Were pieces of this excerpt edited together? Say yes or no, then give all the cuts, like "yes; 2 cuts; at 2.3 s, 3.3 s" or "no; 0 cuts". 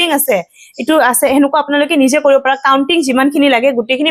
no; 0 cuts